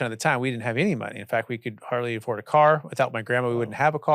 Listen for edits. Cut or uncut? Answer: uncut